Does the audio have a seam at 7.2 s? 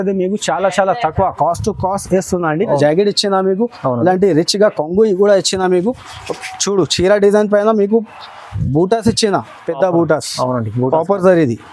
no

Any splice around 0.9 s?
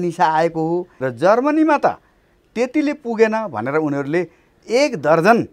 yes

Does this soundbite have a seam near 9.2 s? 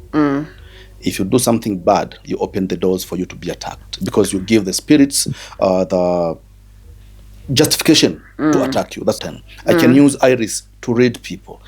yes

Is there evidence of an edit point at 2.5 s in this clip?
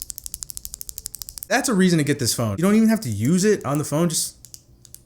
yes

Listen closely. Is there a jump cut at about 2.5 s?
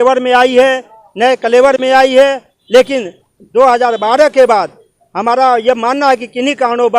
yes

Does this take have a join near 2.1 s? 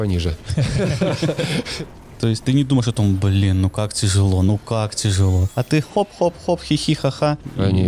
yes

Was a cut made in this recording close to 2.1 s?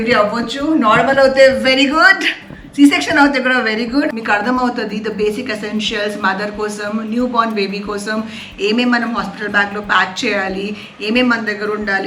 no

